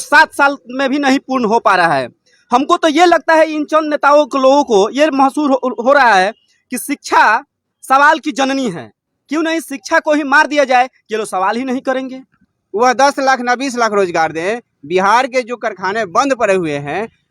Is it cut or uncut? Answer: cut